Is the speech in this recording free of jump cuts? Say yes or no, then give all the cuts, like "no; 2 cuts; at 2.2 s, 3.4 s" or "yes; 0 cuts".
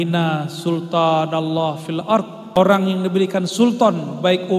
no; 1 cut; at 2.6 s